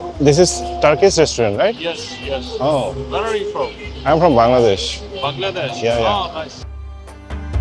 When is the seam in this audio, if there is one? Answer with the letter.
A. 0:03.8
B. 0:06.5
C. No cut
B